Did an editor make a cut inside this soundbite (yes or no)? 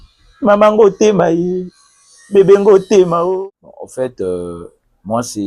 yes